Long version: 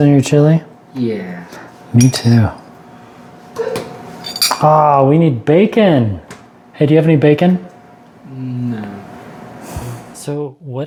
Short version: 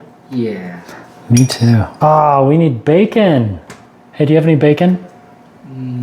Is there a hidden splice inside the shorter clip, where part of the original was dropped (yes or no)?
yes